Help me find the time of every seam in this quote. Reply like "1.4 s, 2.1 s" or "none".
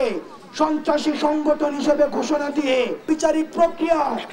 3.0 s